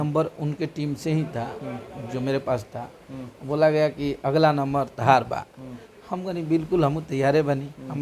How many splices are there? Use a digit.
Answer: 0